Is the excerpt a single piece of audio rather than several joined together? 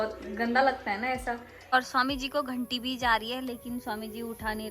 no; 1 cut; at 1.7 s

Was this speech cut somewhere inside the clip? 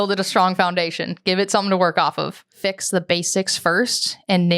yes; 1 cut; at 2.6 s

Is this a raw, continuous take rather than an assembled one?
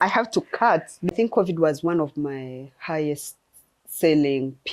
no; 1 cut; at 1.1 s

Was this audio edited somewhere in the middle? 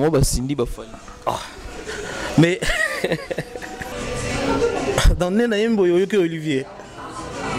yes; 1 cut; at 3.8 s

